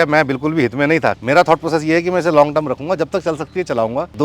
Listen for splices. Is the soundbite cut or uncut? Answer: cut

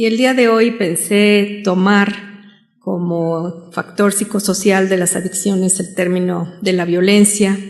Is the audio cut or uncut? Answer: cut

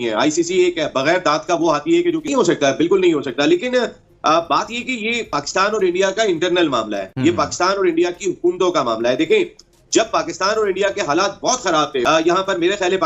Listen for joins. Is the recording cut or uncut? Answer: uncut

